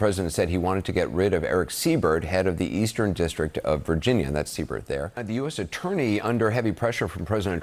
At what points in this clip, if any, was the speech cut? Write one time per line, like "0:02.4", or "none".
0:05.2